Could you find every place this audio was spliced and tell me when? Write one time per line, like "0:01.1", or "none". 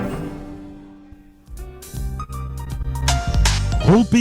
0:01.7